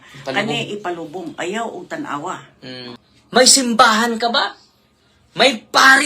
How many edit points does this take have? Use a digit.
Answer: 1